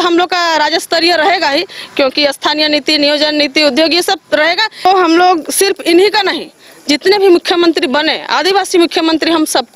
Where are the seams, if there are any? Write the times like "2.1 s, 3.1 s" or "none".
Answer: 4.8 s

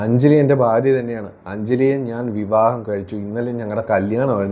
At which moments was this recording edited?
none

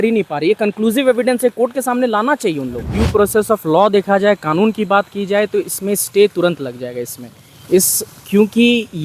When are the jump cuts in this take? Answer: 2.9 s

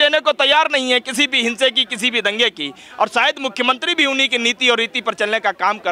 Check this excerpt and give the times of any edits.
none

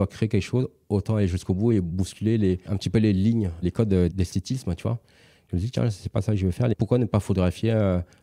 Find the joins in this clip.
none

